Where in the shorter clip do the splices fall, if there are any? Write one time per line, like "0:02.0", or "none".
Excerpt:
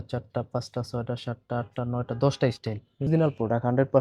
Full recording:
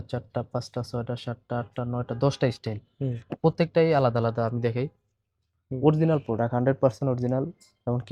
0:03.1